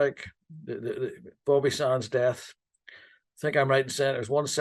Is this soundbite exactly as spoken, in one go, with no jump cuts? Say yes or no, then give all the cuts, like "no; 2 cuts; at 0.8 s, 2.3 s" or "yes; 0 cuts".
yes; 0 cuts